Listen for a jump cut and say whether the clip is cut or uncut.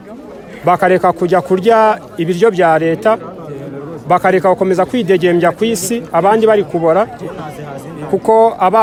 uncut